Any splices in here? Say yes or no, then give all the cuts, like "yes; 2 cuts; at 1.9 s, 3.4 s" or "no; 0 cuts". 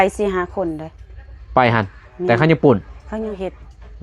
no; 0 cuts